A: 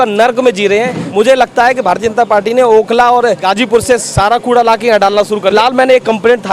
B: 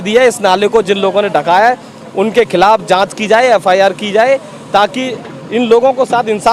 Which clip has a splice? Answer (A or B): A